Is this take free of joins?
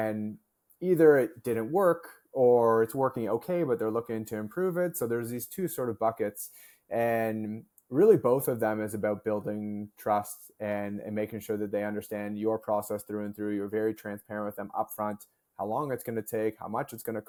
yes; 0 cuts

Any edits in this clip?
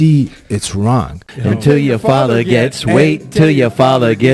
yes; 1 cut; at 1.2 s

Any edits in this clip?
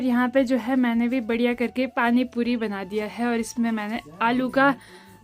no; 0 cuts

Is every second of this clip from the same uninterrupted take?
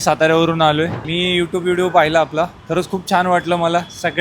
no; 1 cut; at 1.0 s

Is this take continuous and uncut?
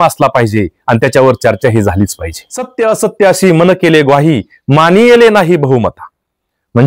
no; 1 cut; at 2.7 s

